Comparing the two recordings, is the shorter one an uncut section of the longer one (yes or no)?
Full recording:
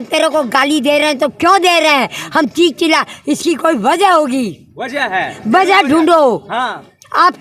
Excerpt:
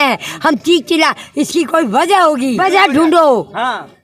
no